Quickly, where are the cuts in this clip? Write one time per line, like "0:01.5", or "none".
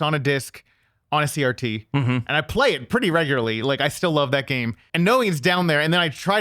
0:04.8